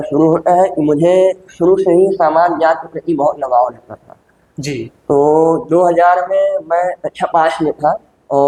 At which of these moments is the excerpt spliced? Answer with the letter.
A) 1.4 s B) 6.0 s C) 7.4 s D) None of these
D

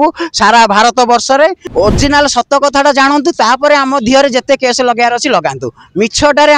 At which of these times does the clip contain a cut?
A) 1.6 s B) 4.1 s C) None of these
A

